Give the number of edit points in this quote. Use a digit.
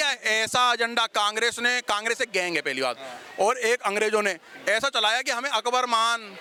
0